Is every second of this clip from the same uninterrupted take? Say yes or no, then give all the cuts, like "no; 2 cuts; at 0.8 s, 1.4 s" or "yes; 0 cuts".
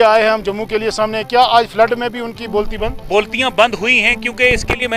no; 1 cut; at 2.9 s